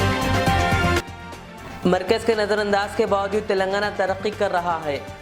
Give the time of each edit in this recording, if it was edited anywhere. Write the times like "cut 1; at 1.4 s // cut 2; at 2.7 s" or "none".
cut 1; at 0.9 s